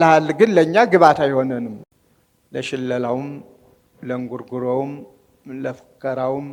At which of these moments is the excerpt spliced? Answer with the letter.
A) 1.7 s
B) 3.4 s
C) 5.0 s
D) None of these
A